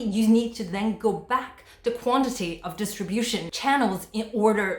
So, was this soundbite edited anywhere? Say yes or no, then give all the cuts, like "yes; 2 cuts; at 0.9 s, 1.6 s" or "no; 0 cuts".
yes; 1 cut; at 3.5 s